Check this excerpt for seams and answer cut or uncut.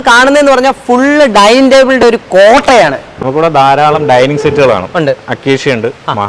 uncut